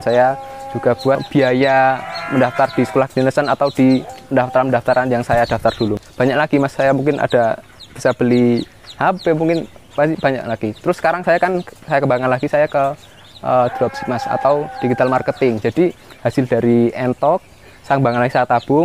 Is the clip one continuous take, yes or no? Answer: no